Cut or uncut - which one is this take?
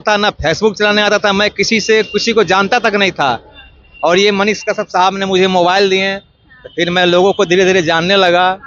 uncut